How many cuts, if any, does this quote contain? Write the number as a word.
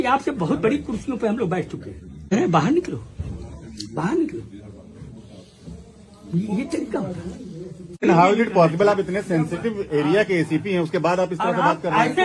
two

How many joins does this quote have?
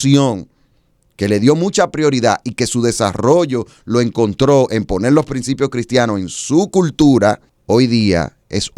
one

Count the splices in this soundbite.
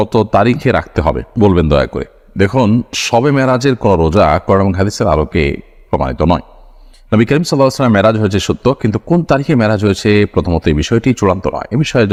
zero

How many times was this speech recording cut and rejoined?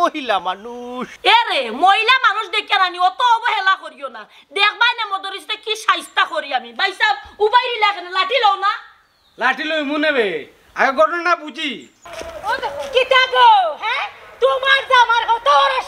two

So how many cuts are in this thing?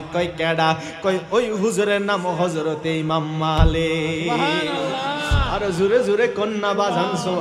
zero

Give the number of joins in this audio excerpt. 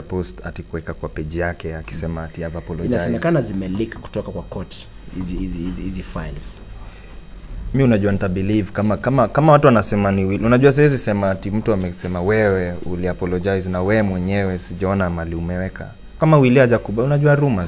one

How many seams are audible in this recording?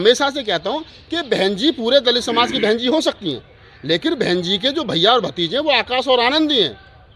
zero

